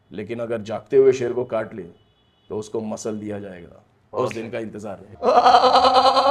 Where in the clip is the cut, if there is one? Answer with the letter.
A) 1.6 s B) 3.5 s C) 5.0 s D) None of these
C